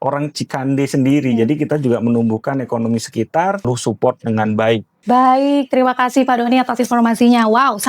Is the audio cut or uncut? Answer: cut